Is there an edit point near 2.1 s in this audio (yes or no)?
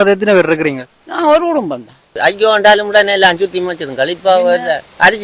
yes